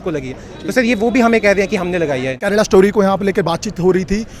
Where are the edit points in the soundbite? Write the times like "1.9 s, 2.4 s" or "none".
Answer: 2.4 s